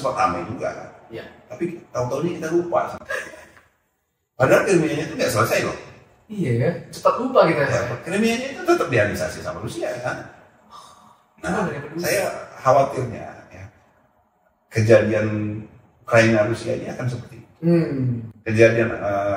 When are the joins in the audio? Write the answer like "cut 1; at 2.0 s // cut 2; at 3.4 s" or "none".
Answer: none